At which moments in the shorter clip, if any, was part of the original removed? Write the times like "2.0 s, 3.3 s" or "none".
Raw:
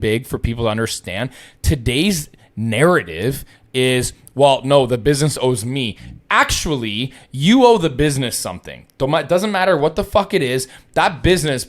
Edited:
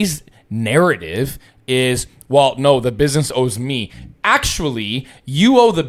none